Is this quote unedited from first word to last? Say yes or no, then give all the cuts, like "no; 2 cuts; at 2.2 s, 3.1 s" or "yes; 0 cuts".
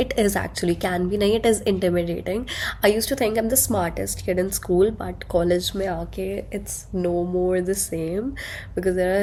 yes; 0 cuts